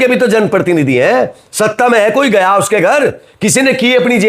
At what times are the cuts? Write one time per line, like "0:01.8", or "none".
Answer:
none